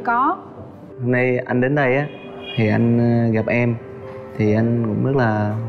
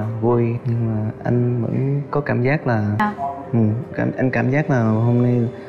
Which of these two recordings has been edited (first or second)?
second